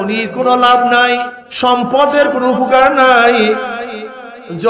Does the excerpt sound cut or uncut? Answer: cut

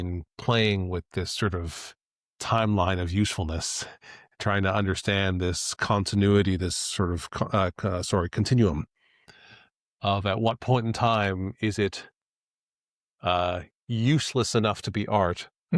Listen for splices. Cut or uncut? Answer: uncut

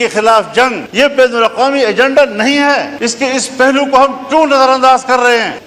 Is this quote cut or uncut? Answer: cut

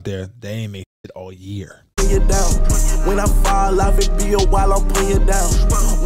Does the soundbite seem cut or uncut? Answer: cut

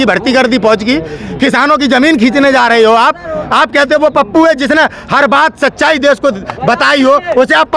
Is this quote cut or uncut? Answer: uncut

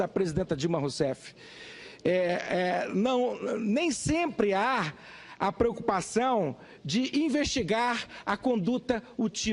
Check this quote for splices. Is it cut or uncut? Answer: cut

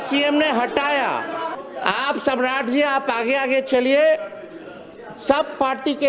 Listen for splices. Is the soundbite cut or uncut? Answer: cut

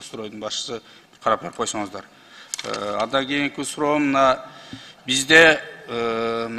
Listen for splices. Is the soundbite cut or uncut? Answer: uncut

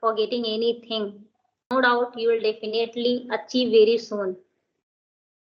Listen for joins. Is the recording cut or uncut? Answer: cut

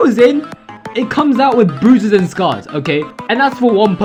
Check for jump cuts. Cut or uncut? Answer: uncut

